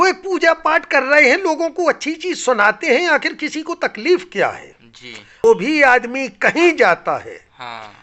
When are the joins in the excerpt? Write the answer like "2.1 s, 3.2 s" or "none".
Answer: 5.4 s